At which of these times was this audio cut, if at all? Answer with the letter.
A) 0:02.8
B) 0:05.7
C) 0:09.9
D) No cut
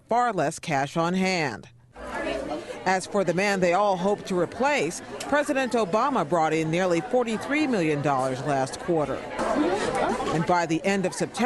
B